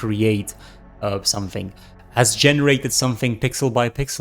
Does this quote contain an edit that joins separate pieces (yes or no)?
yes